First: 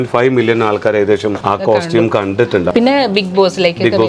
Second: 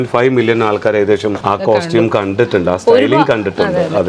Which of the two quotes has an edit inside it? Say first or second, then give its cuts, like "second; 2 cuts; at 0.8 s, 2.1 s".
first; 1 cut; at 2.7 s